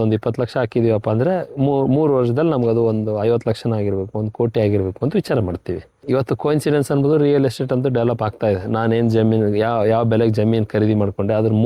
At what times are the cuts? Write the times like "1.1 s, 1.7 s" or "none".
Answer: 5.9 s